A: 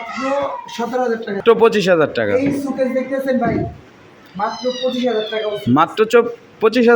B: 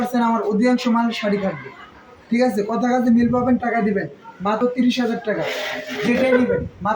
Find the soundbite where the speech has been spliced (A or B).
A